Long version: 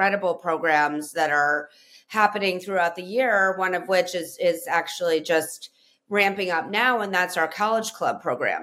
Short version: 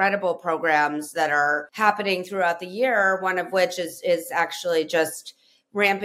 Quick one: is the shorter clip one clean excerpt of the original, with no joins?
no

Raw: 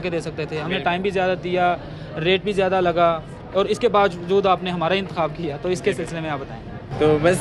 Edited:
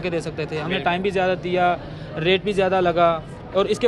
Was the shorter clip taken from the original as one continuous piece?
yes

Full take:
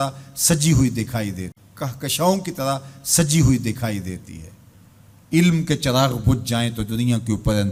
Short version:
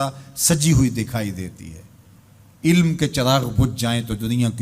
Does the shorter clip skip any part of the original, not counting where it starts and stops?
yes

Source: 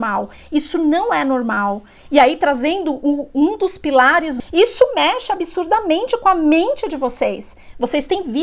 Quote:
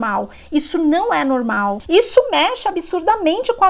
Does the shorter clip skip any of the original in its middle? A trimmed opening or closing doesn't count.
yes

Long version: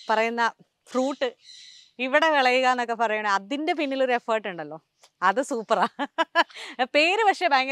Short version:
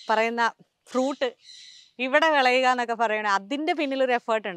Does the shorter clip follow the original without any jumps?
yes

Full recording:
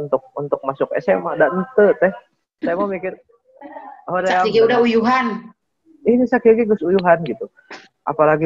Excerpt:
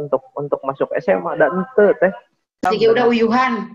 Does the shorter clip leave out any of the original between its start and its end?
yes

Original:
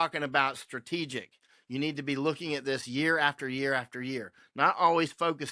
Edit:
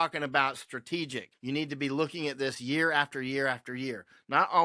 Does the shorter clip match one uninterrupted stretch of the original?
no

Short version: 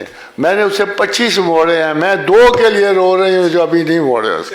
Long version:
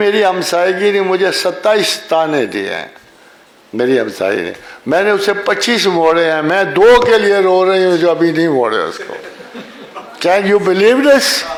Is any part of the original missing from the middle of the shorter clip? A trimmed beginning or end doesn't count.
no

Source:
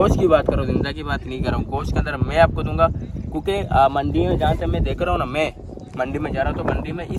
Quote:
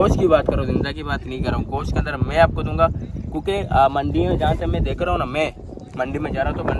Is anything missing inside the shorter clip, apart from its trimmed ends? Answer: no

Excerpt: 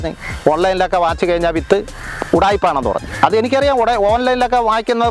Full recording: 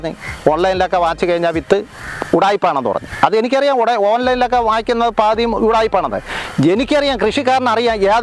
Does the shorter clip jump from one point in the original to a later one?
no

